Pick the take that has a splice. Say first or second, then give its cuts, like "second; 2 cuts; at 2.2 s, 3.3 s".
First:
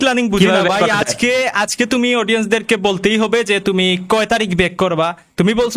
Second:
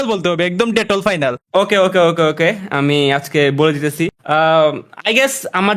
second; 2 cuts; at 1.4 s, 4.2 s